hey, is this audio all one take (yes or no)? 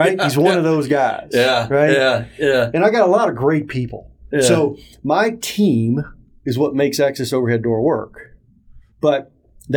yes